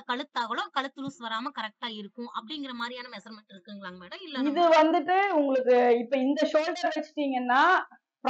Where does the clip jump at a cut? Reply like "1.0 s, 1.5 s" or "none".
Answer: none